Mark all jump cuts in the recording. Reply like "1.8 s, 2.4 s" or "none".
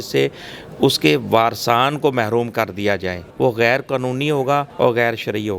3.2 s, 4.7 s